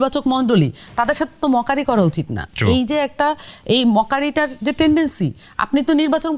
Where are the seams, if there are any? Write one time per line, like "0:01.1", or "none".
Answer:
none